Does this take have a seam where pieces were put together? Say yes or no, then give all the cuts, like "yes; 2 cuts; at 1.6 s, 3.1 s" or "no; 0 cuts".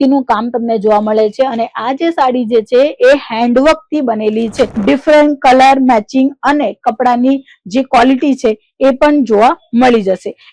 yes; 1 cut; at 4.8 s